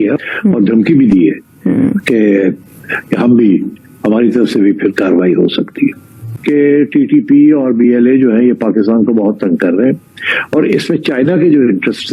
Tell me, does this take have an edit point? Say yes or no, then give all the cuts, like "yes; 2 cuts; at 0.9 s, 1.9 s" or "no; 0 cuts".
no; 0 cuts